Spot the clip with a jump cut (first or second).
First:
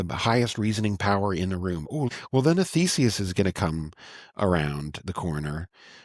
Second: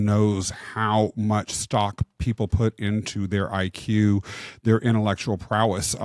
first